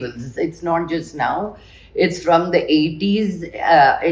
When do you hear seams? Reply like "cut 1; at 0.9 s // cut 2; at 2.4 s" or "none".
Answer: none